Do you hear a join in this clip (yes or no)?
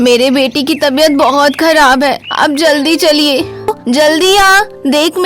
yes